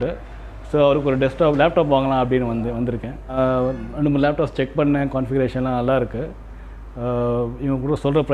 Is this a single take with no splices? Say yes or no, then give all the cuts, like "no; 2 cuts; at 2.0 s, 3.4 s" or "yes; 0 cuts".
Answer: no; 1 cut; at 3.4 s